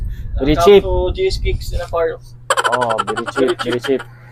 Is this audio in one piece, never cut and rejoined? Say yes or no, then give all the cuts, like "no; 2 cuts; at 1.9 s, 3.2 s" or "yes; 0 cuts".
yes; 0 cuts